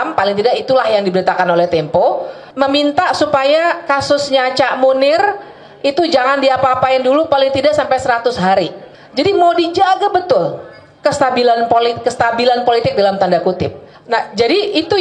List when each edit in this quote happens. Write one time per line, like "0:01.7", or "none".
none